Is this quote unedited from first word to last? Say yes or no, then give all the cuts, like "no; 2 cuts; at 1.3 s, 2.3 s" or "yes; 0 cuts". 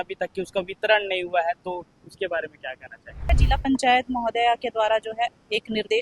no; 1 cut; at 3.4 s